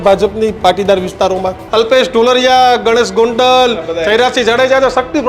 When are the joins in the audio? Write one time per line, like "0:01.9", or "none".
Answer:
0:01.6